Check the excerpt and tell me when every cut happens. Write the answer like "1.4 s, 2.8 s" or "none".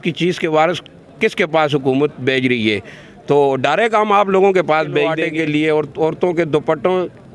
5.2 s